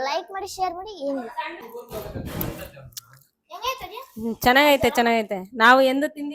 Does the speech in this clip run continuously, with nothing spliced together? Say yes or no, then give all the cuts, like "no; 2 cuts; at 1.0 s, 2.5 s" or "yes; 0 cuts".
no; 1 cut; at 1.7 s